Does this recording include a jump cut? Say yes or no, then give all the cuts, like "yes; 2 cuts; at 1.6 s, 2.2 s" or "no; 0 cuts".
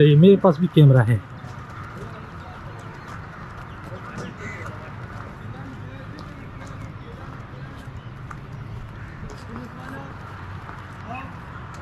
no; 0 cuts